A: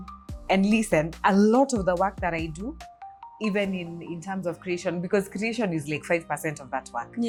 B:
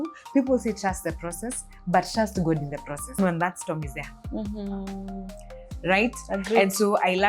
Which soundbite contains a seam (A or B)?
B